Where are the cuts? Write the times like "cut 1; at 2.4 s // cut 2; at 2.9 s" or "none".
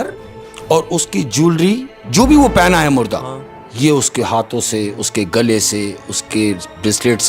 none